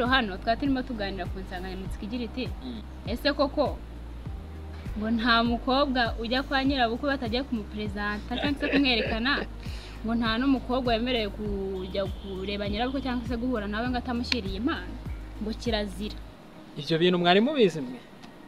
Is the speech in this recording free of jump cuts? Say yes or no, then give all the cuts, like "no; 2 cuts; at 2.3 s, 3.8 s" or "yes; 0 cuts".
no; 1 cut; at 2.9 s